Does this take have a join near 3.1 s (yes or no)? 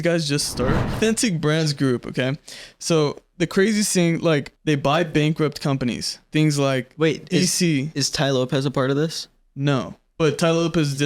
no